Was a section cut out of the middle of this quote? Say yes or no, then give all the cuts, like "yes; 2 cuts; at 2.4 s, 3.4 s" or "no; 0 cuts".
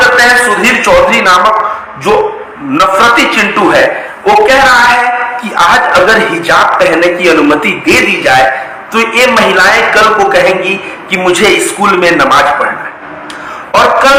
no; 0 cuts